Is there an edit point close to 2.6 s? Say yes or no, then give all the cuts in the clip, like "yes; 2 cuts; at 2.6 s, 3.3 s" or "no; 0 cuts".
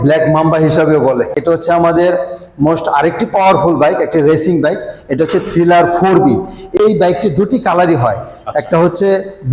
no; 2 cuts; at 1.3 s, 6.8 s